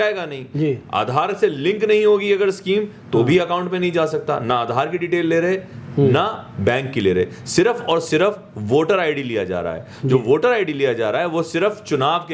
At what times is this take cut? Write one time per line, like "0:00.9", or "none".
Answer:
none